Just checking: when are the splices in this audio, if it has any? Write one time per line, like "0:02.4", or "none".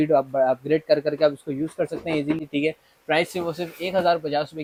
none